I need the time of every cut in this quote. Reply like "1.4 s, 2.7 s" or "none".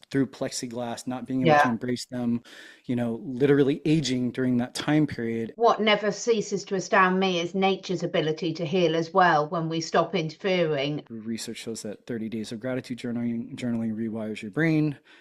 5.5 s, 11.0 s

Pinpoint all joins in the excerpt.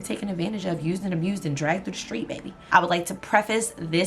2.5 s

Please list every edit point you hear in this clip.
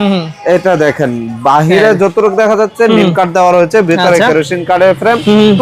none

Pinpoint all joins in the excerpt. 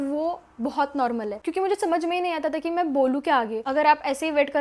1.4 s, 3.6 s

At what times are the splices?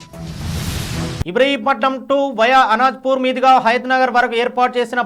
1.2 s

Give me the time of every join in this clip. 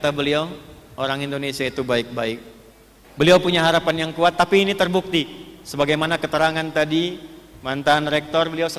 2.5 s

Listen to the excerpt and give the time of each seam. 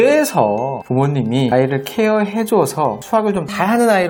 none

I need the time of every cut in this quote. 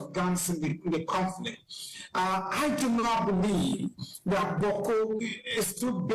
none

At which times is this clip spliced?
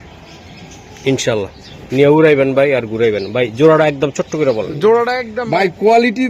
5.3 s

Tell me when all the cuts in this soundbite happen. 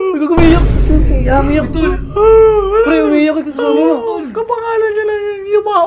none

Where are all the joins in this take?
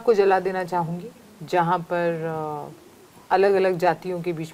none

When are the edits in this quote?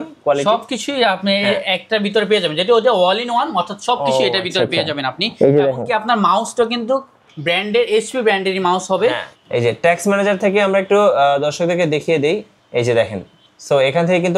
9.3 s, 12.5 s

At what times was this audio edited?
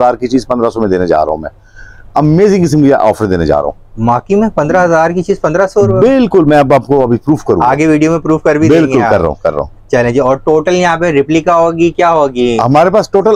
none

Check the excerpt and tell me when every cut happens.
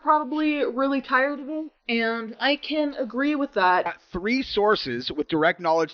3.9 s

